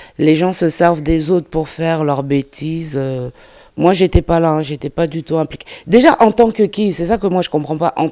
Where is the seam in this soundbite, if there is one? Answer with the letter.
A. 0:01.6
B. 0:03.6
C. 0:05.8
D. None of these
D